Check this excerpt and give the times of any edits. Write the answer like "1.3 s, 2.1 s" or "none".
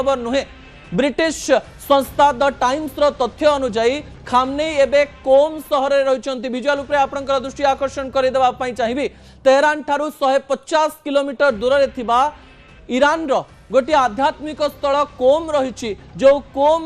9.8 s